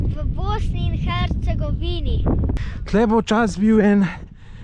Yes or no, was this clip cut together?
yes